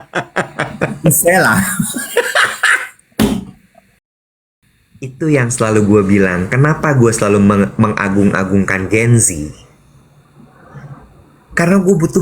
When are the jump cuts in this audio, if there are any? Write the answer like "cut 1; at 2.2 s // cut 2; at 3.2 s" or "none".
cut 1; at 4.3 s